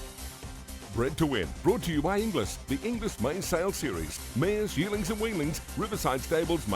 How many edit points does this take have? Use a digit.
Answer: 1